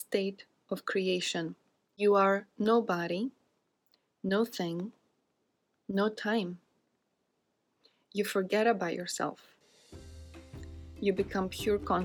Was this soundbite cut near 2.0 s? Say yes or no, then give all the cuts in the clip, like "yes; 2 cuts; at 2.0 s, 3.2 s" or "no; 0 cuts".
yes; 1 cut; at 2.0 s